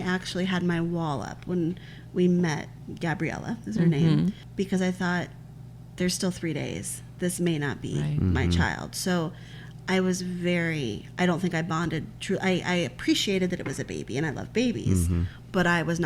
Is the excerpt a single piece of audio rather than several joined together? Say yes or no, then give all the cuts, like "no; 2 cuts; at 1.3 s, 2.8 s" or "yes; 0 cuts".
yes; 0 cuts